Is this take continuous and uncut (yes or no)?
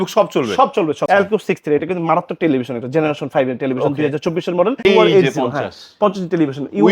no